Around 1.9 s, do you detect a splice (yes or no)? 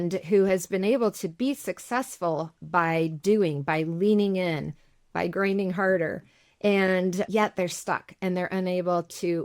no